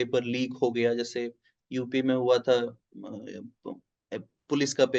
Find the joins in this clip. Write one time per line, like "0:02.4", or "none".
none